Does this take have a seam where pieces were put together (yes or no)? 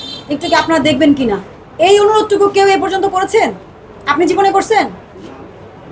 no